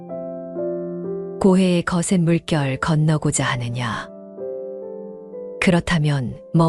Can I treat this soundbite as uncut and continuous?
no; 3 cuts; at 1.0 s, 4.1 s, 5.6 s

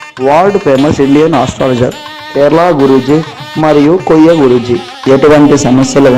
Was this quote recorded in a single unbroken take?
no; 1 cut; at 5.0 s

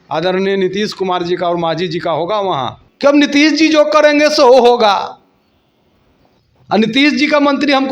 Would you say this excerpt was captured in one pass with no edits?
no; 1 cut; at 2.8 s

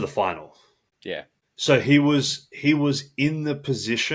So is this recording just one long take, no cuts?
no; 1 cut; at 1.2 s

